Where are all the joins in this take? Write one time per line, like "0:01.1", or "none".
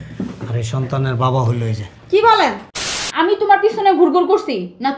0:02.7